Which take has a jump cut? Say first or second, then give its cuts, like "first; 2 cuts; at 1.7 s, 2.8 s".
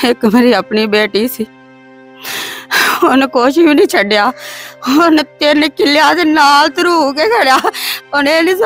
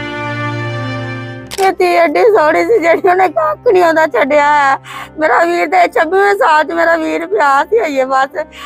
second; 1 cut; at 1.4 s